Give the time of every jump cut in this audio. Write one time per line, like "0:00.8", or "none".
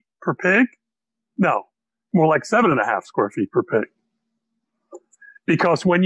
none